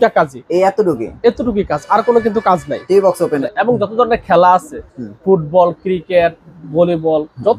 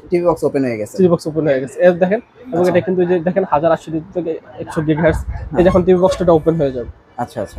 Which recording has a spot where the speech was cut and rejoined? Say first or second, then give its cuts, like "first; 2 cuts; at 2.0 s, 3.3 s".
first; 1 cut; at 3.5 s